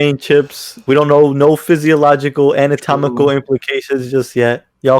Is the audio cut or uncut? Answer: uncut